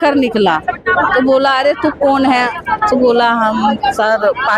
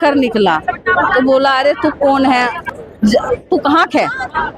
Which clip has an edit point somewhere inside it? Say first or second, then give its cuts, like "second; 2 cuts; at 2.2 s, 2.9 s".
second; 1 cut; at 2.7 s